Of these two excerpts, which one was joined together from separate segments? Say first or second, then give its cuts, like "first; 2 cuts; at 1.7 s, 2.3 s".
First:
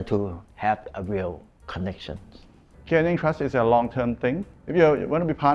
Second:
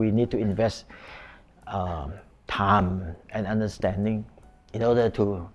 first; 1 cut; at 4.4 s